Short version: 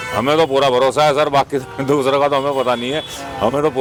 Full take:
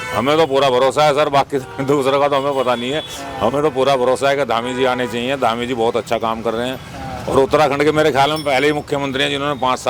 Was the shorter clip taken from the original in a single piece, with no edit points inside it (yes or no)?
yes